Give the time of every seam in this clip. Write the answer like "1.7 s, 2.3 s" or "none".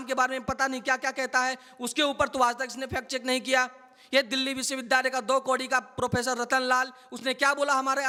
none